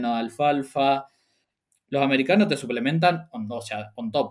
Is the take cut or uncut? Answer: uncut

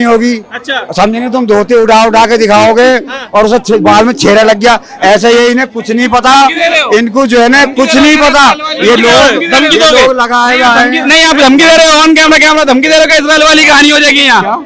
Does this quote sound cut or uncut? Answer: uncut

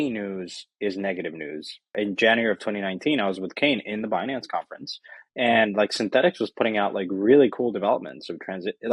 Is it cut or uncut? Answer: cut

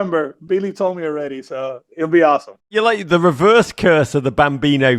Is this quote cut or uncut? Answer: uncut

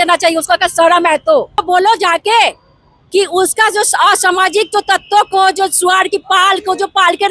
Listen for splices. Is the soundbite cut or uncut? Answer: cut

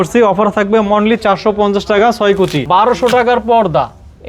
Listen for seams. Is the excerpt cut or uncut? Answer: cut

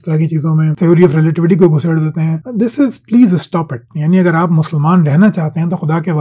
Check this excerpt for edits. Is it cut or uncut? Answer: uncut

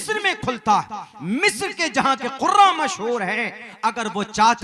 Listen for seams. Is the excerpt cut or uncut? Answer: uncut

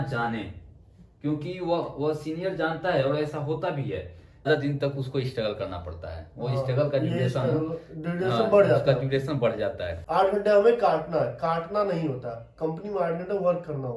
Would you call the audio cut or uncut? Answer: cut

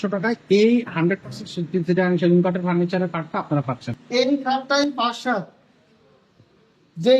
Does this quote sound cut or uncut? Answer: cut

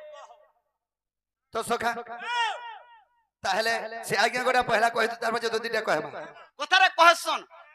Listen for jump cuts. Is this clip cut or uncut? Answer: cut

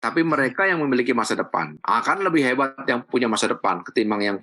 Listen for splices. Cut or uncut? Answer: uncut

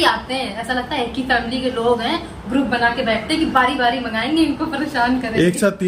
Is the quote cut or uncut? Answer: uncut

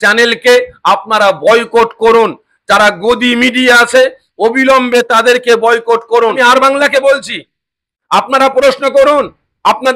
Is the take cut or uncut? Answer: cut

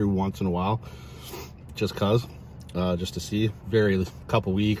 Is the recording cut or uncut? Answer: uncut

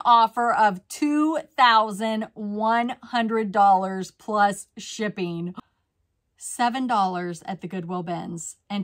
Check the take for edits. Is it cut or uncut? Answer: cut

